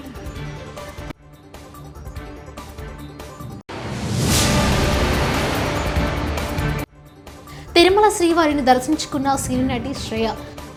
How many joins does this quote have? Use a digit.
0